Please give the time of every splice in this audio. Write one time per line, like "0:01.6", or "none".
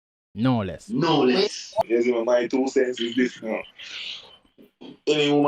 0:01.8